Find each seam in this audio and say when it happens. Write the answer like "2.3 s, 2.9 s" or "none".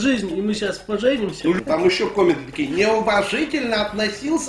1.6 s

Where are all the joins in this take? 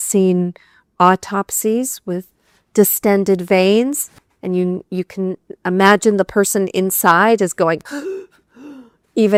none

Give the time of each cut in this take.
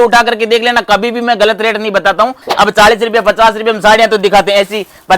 2.5 s

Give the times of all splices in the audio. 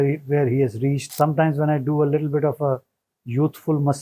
1.1 s

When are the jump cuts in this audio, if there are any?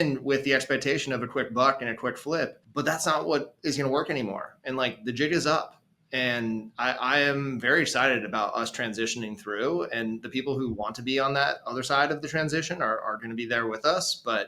2.6 s

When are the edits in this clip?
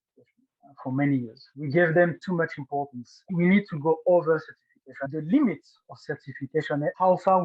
3.3 s, 5.0 s

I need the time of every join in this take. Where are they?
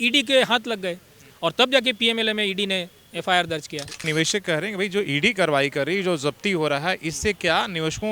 4.1 s

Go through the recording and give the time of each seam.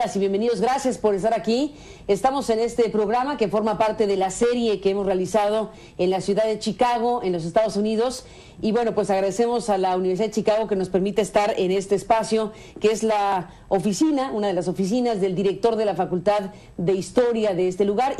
15.4 s

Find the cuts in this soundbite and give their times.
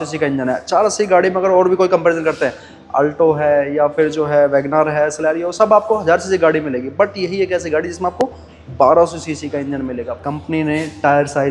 10.1 s

